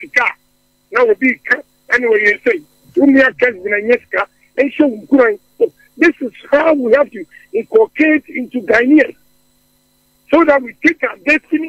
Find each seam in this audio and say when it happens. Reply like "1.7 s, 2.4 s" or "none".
2.7 s